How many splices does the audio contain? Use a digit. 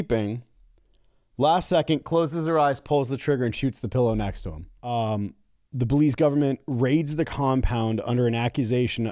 1